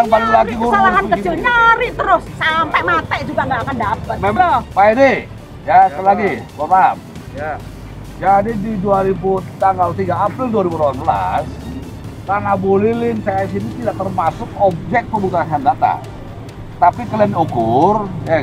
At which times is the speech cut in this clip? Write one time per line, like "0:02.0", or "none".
none